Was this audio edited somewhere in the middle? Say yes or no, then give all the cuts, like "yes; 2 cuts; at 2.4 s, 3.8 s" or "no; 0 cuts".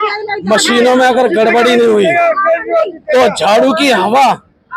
no; 0 cuts